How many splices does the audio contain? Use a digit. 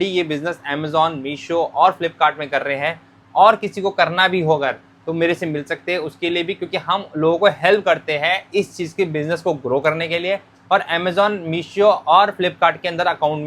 0